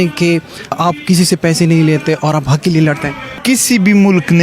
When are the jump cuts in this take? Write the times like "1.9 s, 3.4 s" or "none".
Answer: 0.8 s, 3.4 s

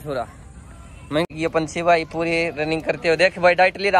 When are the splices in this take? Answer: 1.3 s

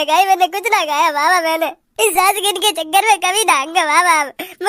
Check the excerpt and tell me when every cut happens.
1.8 s

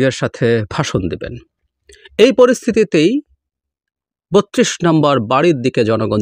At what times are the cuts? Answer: none

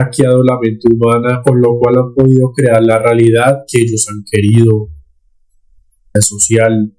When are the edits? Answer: 6.1 s

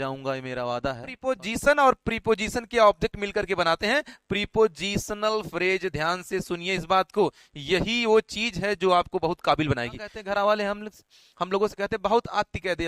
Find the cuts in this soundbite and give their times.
1.3 s, 10.1 s

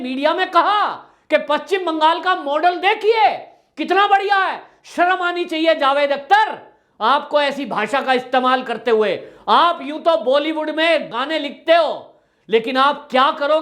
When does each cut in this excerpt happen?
11.1 s

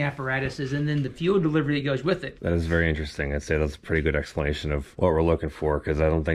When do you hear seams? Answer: 2.3 s, 4.9 s

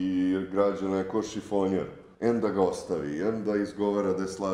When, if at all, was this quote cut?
2.0 s

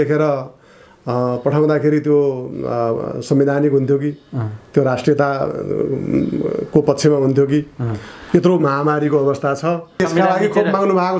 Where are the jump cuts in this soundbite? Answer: 10.0 s

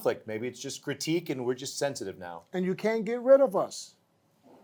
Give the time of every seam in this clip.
none

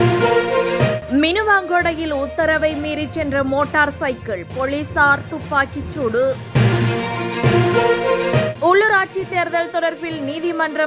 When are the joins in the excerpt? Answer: 1.0 s

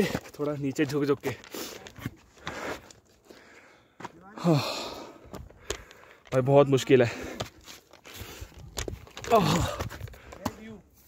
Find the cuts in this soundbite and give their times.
none

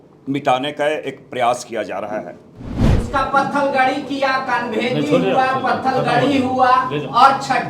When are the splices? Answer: 2.9 s

